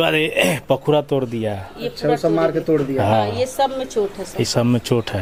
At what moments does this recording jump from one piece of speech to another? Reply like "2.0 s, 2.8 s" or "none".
none